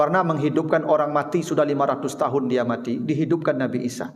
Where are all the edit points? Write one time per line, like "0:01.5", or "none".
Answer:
none